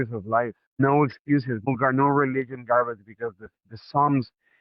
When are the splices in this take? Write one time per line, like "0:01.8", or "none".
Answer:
0:00.8
0:01.7